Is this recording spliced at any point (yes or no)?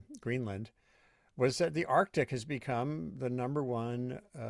no